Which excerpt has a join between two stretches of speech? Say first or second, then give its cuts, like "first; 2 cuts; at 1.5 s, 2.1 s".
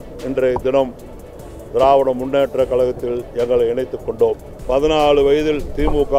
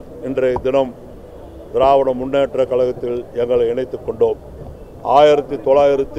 first; 1 cut; at 4.5 s